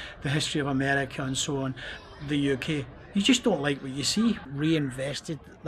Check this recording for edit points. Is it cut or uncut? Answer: cut